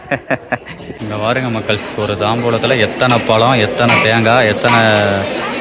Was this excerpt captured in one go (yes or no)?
no